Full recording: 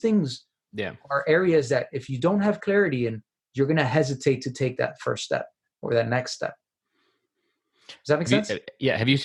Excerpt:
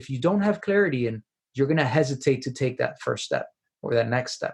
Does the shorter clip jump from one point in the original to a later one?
no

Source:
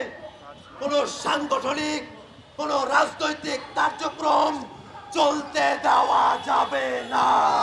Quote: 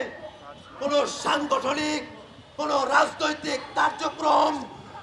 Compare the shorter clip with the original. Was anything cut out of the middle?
no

